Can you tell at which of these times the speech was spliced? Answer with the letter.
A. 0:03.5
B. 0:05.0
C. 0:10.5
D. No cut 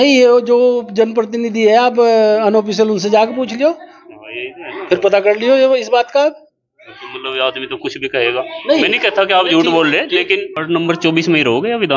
C